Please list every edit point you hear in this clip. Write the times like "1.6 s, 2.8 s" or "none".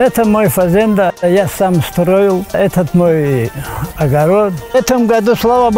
1.1 s, 2.5 s, 4.6 s